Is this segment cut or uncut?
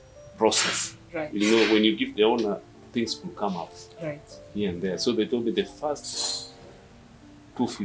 uncut